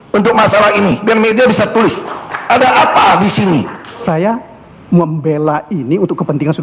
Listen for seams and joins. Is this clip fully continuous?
no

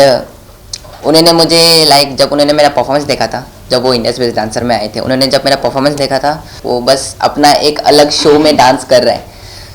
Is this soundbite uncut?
no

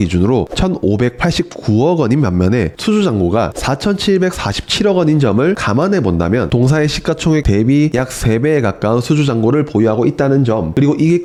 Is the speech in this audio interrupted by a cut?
no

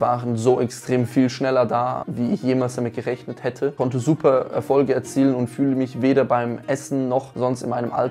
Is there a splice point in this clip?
yes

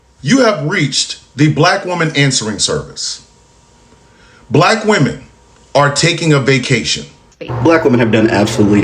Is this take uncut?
no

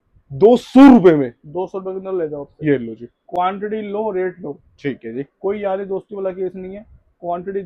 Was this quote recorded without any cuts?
yes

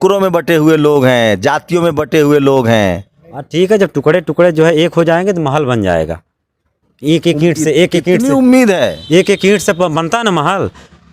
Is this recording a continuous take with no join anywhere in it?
yes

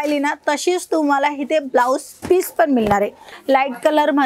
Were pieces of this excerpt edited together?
yes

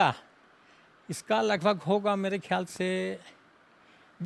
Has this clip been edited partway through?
no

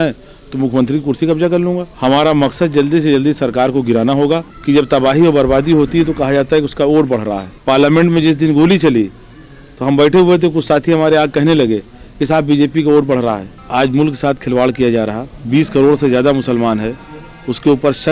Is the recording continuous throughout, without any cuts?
no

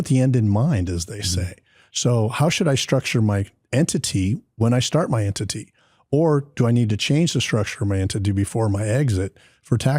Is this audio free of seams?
no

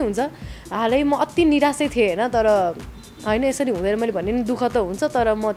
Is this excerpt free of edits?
yes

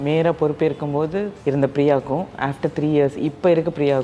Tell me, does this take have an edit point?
yes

